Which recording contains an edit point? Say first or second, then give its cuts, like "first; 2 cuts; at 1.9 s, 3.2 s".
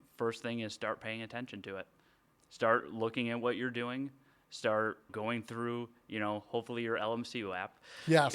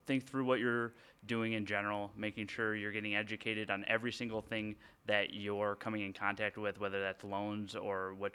first; 2 cuts; at 2.3 s, 5.1 s